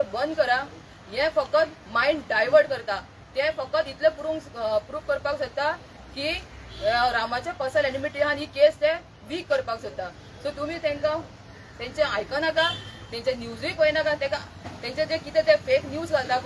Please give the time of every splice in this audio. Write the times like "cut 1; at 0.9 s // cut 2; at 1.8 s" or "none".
none